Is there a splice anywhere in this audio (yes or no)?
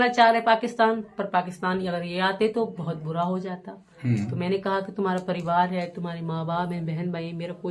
no